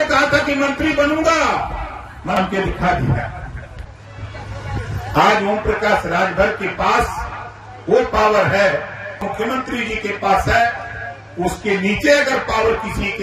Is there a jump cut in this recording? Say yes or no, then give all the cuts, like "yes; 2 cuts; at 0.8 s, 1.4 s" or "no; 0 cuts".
yes; 2 cuts; at 2.4 s, 9.2 s